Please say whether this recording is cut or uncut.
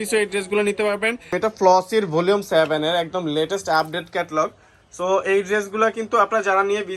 cut